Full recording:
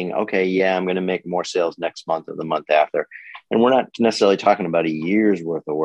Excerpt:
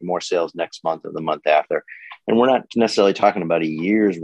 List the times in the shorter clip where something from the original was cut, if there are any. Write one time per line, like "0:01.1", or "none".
none